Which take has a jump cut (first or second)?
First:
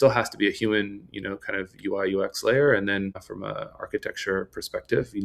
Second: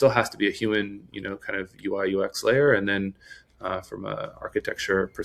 first